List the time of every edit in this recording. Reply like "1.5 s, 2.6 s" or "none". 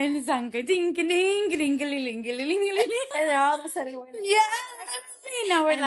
3.1 s